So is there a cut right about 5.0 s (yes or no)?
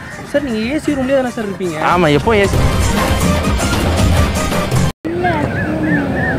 yes